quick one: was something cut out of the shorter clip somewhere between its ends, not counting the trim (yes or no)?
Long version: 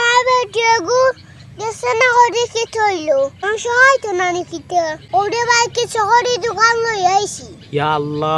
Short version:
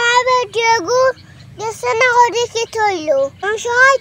no